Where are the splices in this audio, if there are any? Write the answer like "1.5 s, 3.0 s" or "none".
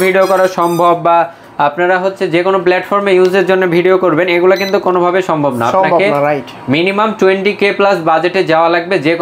none